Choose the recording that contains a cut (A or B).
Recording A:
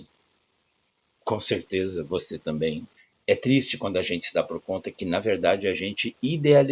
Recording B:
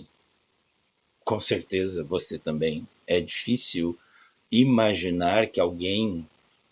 A